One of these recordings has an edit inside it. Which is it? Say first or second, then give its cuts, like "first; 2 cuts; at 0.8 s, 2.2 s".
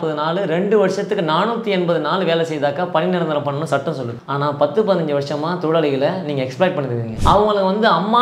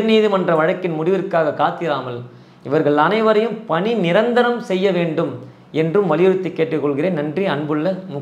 first; 2 cuts; at 4.2 s, 7.1 s